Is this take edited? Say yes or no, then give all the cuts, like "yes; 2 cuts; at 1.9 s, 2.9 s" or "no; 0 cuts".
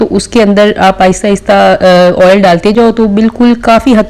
no; 0 cuts